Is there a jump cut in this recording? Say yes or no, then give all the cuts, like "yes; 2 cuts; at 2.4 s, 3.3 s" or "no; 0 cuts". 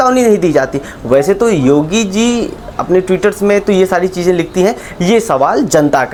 no; 0 cuts